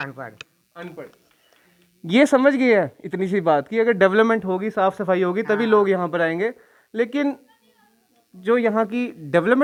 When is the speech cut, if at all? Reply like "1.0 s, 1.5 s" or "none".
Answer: none

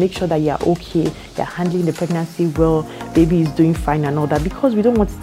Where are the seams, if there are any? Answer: none

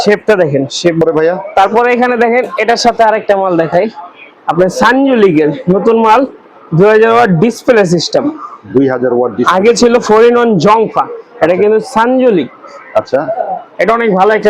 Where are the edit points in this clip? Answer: 1.0 s

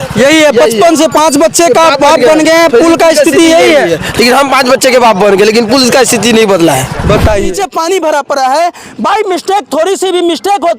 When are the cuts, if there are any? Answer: 7.4 s

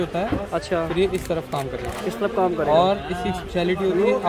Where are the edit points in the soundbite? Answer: none

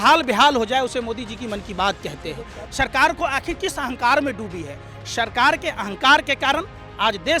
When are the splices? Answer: 2.6 s

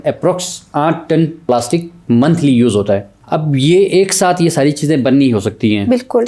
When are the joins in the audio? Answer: 1.4 s, 3.1 s

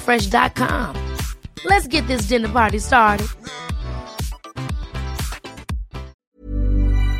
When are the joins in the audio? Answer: 6.2 s

